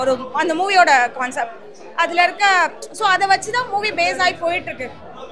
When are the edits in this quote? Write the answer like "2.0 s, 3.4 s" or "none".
none